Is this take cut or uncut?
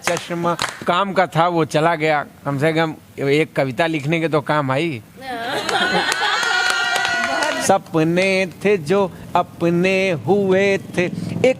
cut